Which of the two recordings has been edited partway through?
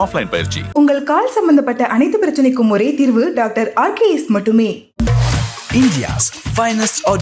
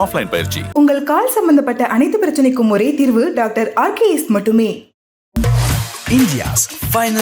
first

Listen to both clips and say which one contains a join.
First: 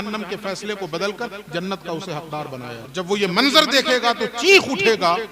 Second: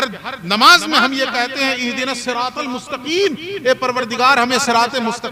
first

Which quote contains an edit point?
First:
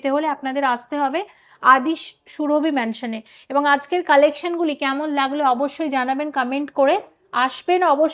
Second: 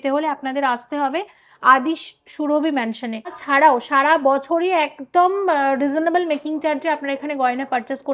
second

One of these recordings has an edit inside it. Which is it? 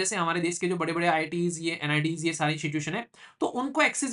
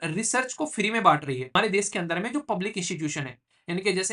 second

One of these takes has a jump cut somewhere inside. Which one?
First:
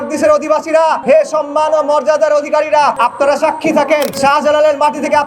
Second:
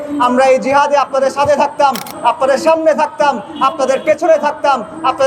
first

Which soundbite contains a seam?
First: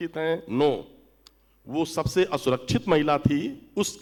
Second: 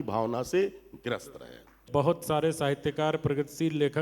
second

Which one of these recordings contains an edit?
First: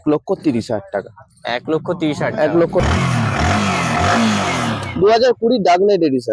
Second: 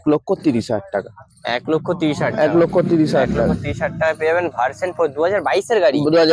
first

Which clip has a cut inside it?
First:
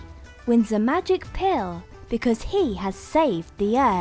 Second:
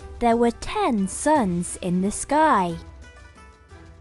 second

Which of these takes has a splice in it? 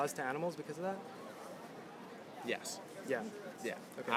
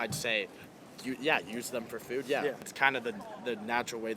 second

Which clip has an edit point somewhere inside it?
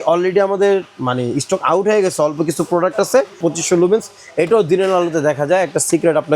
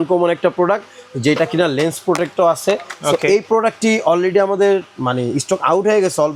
first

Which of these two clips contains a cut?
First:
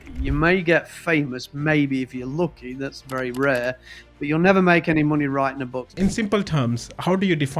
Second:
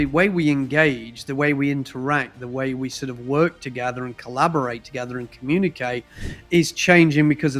first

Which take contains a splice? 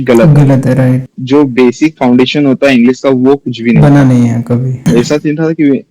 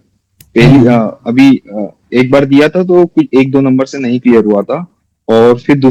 first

